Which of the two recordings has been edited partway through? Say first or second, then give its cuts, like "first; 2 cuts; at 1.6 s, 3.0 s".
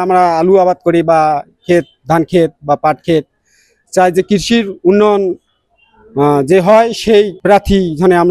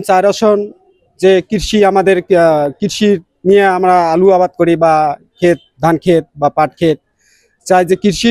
first; 1 cut; at 7.4 s